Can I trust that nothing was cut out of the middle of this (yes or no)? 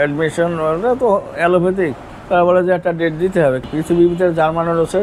no